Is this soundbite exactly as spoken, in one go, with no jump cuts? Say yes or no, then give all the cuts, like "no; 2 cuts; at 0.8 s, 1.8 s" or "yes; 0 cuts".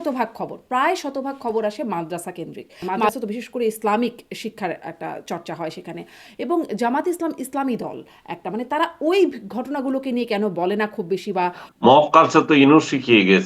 no; 2 cuts; at 3.1 s, 11.6 s